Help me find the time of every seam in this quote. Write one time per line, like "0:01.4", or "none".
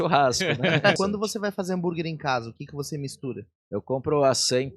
0:01.0
0:03.5